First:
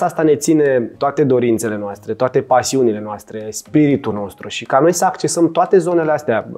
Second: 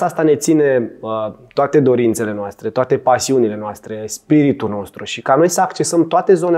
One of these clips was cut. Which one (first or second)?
first